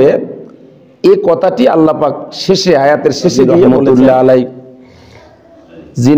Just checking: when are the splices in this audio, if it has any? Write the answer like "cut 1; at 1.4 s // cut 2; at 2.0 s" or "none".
cut 1; at 3.7 s